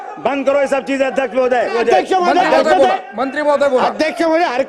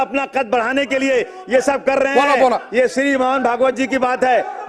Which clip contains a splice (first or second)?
first